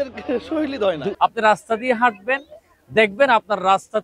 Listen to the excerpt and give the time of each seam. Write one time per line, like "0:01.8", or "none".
0:01.2